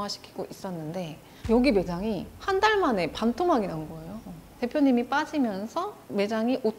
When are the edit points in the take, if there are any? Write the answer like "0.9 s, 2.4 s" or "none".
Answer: none